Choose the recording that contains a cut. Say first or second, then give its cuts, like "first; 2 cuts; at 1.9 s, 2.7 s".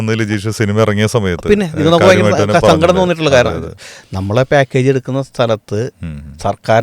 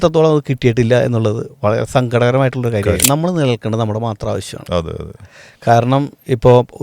second; 1 cut; at 3.0 s